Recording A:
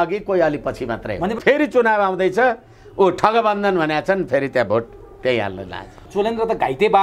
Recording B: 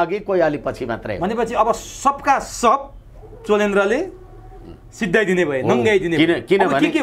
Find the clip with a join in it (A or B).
A